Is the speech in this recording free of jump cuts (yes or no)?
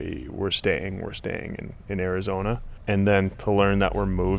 no